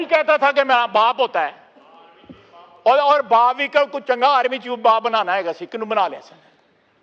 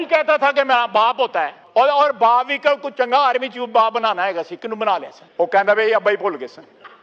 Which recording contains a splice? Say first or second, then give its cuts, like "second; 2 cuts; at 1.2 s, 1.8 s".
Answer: second; 2 cuts; at 1.6 s, 5.2 s